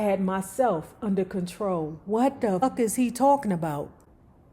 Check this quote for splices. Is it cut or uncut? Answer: cut